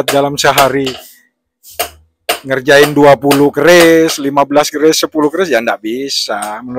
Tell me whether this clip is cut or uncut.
uncut